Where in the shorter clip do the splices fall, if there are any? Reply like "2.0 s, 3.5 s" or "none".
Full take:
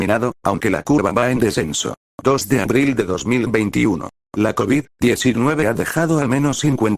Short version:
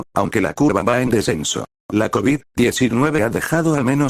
1.7 s